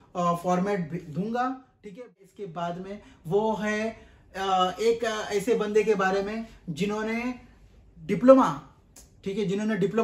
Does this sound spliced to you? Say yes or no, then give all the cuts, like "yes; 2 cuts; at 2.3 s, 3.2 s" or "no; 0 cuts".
yes; 1 cut; at 2.0 s